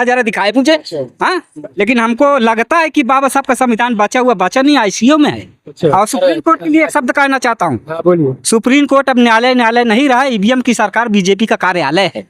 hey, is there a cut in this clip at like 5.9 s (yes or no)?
yes